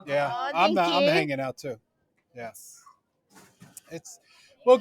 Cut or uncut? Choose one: uncut